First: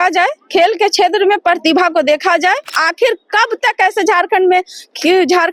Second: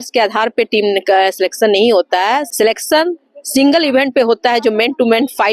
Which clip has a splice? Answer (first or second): first